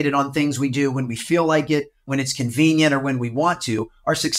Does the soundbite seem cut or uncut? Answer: cut